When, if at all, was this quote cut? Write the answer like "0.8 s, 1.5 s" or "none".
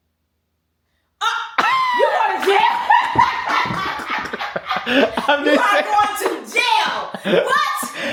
none